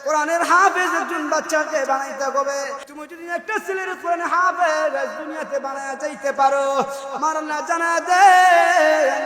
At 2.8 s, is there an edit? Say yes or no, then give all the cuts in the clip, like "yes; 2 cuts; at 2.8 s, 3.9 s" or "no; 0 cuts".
yes; 1 cut; at 2.8 s